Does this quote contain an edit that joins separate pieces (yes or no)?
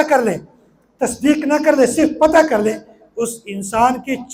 no